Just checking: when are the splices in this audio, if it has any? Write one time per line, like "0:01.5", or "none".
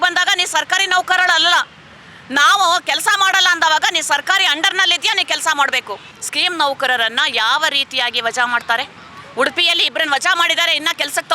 0:06.1